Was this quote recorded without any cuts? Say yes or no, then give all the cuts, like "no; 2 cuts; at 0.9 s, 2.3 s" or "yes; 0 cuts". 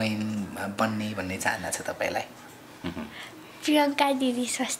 yes; 0 cuts